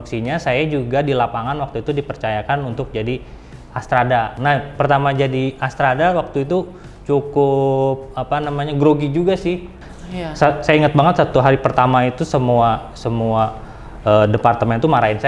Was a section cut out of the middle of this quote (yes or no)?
yes